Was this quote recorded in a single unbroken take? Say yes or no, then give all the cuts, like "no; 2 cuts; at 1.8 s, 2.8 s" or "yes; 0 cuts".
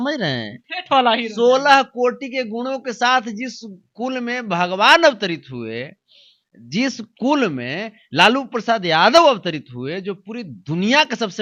yes; 0 cuts